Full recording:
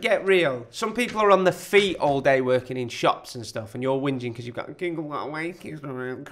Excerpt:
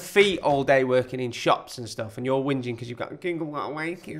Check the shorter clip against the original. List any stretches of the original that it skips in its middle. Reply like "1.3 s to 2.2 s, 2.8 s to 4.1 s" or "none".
none